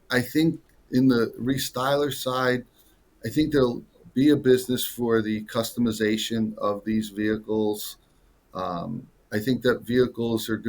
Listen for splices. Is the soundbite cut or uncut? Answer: uncut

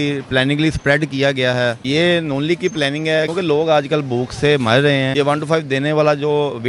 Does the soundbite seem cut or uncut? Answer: cut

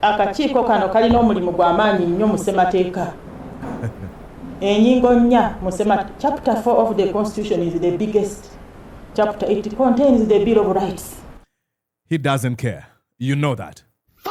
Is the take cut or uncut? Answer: uncut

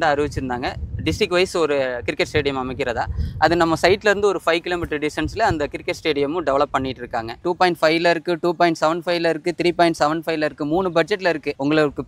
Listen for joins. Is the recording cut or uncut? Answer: cut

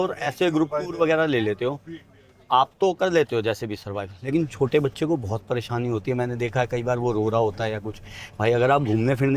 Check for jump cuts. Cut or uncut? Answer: uncut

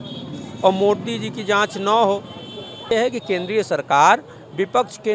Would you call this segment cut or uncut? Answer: cut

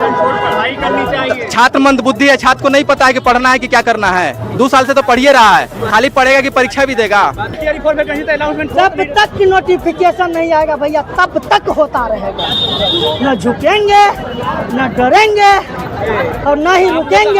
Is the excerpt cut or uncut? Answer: cut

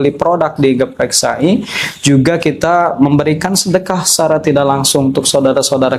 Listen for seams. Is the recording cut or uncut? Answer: uncut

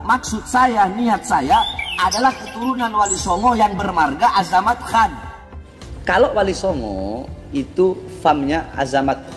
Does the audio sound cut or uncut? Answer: cut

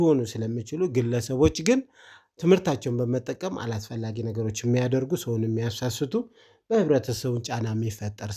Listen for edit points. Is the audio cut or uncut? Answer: uncut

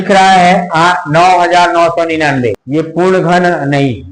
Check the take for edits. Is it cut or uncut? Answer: cut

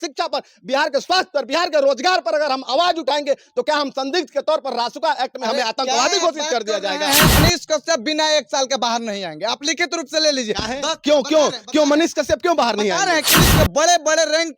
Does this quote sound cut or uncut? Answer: cut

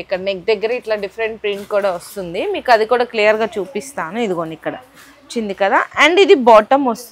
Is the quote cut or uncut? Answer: uncut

